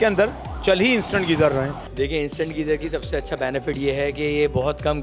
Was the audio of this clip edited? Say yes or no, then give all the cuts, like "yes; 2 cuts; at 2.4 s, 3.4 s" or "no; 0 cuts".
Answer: no; 0 cuts